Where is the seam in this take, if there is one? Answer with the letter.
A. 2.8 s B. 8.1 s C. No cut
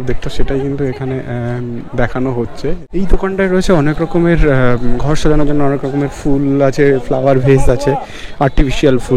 A